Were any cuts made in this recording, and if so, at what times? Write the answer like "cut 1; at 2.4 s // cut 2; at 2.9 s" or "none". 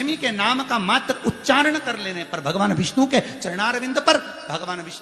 none